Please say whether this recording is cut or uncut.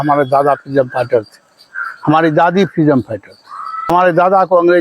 cut